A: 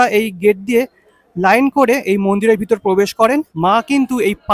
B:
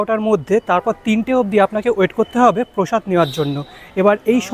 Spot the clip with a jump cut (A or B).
A